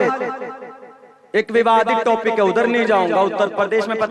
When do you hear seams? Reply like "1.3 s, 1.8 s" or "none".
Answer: none